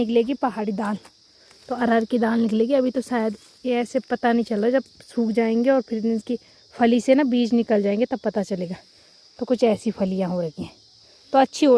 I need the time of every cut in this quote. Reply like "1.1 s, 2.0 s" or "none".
none